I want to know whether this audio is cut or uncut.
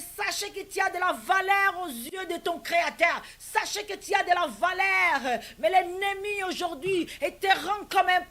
cut